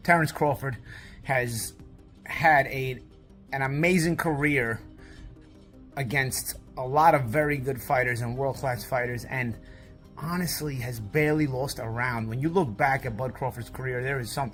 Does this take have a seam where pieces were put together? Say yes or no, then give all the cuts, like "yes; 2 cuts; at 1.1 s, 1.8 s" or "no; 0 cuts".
no; 0 cuts